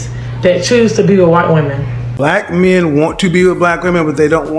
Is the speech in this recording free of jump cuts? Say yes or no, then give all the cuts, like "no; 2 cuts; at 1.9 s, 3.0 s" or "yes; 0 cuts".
no; 1 cut; at 2.0 s